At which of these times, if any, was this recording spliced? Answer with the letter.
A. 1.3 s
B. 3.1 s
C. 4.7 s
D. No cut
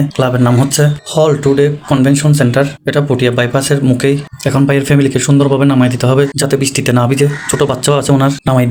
D